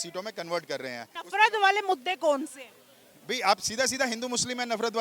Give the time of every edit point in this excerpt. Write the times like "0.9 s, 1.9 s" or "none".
1.2 s

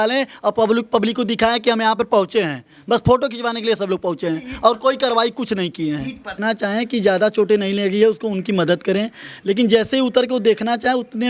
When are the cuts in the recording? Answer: 6.4 s

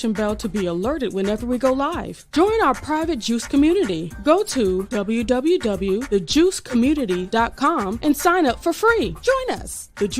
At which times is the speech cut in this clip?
9.3 s

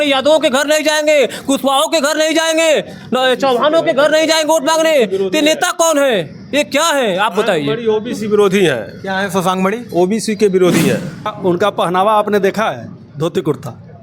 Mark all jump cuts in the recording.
11.3 s

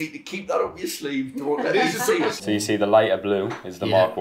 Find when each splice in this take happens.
2.4 s

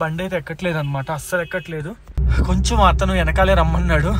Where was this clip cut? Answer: 2.3 s

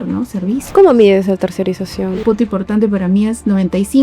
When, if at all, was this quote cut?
2.2 s

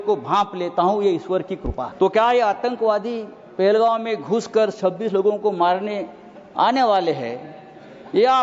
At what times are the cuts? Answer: 1.8 s

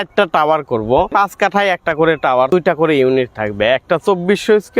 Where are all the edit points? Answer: 1.1 s, 2.5 s

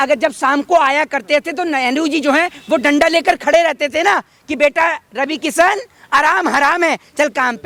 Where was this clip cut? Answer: none

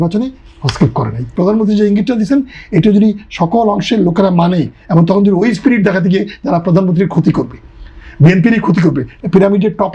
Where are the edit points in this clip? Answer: 1.3 s, 9.1 s

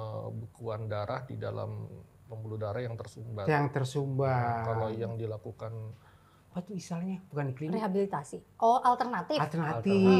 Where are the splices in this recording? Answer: 6.5 s

